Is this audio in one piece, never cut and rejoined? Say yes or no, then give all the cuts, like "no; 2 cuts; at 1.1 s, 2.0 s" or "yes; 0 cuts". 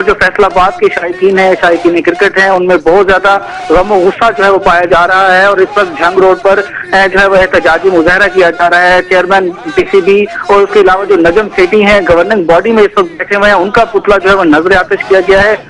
yes; 0 cuts